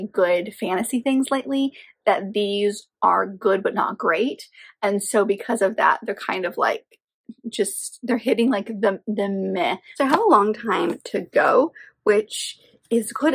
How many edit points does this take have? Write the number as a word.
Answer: one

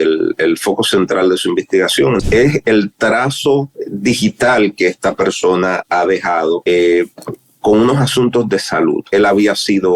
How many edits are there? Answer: four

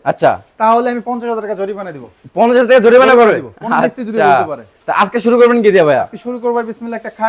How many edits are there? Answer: zero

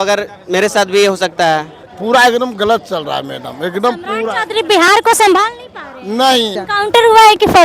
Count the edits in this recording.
two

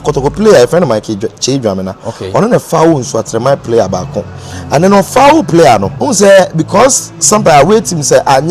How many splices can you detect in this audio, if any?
one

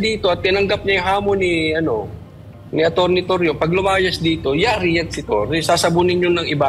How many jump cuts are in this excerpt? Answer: zero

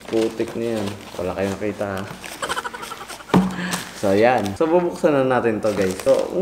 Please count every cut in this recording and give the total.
one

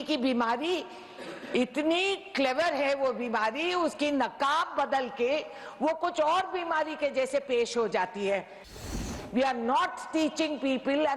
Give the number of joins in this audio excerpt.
one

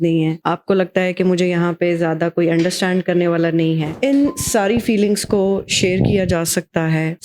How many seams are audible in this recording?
one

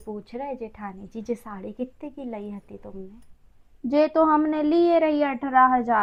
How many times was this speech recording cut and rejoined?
zero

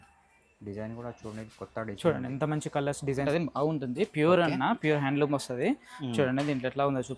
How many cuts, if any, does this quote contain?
one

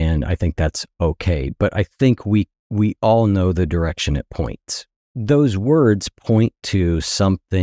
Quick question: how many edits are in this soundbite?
one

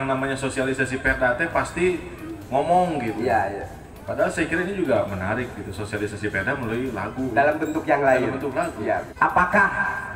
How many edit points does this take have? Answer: one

